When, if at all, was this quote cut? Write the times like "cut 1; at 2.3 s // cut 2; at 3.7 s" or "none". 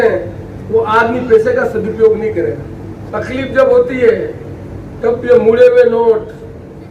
cut 1; at 3.0 s